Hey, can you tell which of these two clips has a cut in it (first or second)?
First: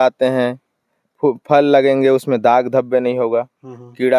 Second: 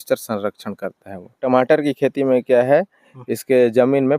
second